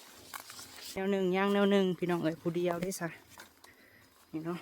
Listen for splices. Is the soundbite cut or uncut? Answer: cut